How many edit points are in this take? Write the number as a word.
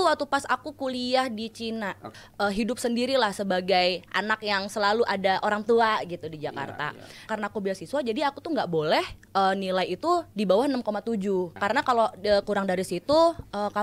three